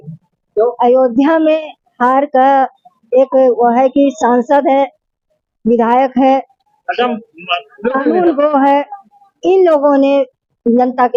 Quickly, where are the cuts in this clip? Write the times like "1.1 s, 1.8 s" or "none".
none